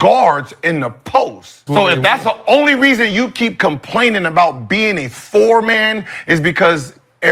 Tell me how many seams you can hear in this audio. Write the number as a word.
one